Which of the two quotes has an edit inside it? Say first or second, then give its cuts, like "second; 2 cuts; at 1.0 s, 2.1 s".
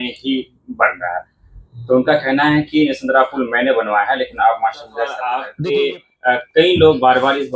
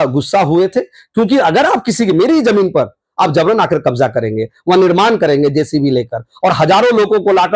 first; 1 cut; at 5.2 s